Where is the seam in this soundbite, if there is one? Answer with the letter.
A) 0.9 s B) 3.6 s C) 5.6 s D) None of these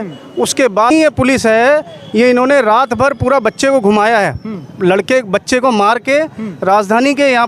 A